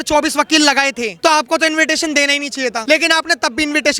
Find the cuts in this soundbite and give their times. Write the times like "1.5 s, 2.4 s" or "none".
1.1 s, 2.8 s